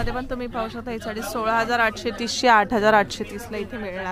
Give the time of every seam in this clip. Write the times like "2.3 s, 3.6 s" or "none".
none